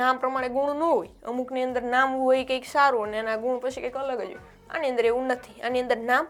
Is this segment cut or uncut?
uncut